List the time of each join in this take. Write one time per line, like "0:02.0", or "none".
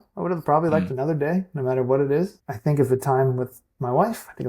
0:02.5

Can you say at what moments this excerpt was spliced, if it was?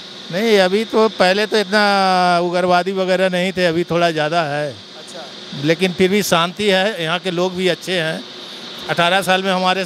none

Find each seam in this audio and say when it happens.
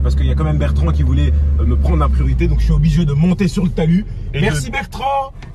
none

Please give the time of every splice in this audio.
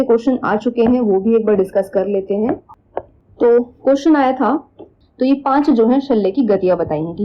0:05.0

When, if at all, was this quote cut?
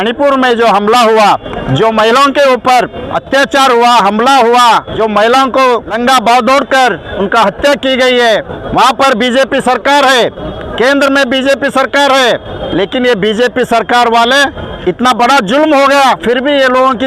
0:01.5
0:03.1
0:04.9
0:06.0
0:07.1
0:08.6
0:10.6
0:12.6
0:14.7

